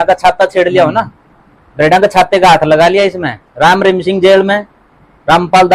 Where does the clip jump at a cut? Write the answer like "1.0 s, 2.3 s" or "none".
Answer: none